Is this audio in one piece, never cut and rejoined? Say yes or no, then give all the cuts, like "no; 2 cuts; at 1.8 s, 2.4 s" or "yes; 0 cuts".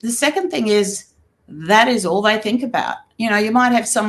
yes; 0 cuts